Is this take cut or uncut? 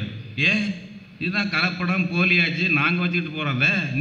uncut